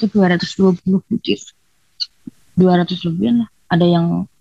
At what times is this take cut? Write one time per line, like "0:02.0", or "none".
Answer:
0:02.1